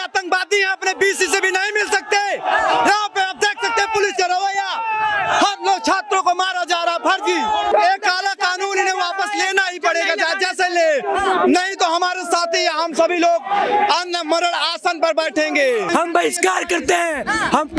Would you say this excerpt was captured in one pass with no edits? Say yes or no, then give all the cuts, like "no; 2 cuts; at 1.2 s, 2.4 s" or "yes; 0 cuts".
no; 2 cuts; at 7.7 s, 15.9 s